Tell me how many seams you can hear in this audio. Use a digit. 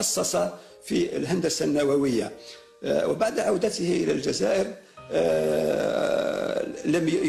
1